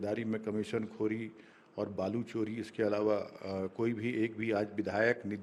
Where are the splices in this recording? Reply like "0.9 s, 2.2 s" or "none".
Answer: none